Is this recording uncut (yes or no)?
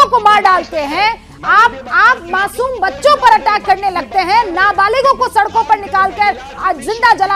yes